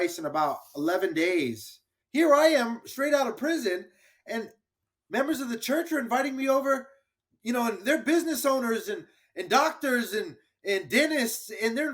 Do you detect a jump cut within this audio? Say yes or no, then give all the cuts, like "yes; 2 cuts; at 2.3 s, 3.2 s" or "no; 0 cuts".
yes; 1 cut; at 2.0 s